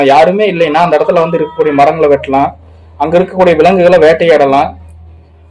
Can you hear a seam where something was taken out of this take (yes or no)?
no